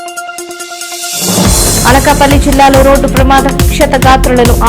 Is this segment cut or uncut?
uncut